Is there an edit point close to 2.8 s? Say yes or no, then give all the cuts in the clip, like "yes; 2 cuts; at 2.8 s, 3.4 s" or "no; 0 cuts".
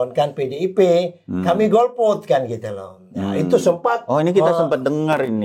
no; 0 cuts